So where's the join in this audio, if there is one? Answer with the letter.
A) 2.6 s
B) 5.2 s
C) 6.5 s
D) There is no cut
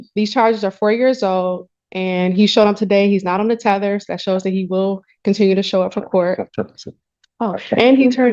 C